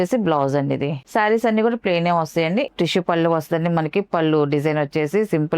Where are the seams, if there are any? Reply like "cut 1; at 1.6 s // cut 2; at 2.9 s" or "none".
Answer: cut 1; at 1.0 s // cut 2; at 2.7 s